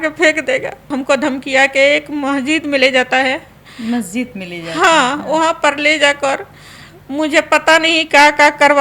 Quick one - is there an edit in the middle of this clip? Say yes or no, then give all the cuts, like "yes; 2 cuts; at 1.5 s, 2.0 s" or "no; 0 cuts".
yes; 1 cut; at 0.9 s